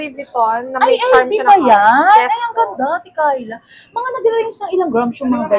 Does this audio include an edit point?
no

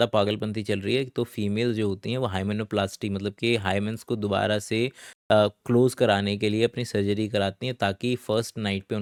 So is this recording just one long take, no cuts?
yes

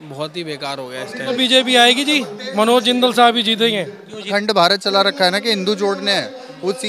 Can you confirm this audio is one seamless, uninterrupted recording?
no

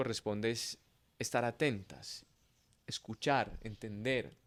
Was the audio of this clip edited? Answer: no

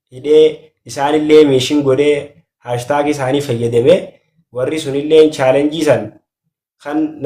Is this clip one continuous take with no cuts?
yes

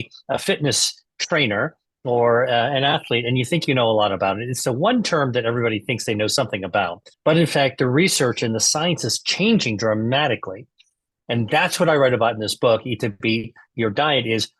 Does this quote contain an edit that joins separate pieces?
yes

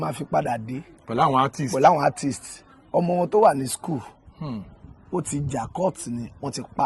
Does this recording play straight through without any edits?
yes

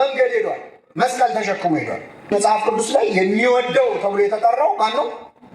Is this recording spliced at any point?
yes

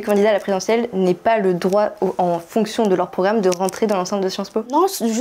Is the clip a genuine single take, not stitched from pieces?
yes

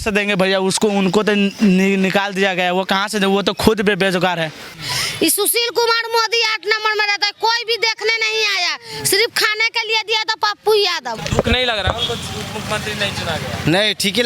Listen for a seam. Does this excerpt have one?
yes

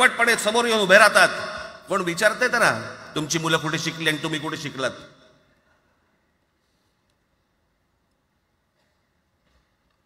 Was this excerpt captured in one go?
yes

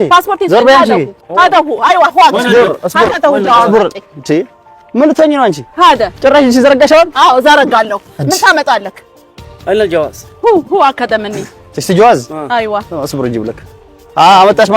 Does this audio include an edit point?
yes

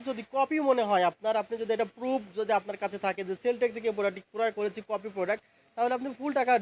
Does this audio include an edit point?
no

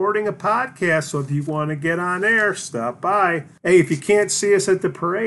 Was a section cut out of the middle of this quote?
yes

